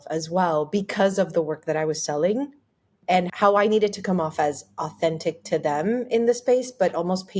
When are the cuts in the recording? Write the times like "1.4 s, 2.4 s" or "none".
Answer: 3.3 s